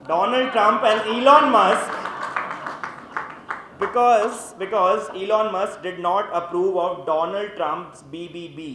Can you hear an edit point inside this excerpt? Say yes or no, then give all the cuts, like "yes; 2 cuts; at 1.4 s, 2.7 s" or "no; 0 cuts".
no; 0 cuts